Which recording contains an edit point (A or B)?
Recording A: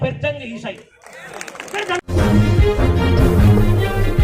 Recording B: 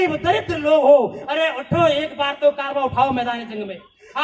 A